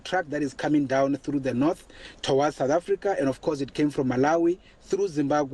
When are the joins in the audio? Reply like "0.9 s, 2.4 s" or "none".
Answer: none